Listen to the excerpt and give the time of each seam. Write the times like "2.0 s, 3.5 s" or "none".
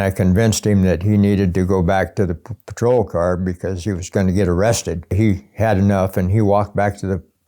5.1 s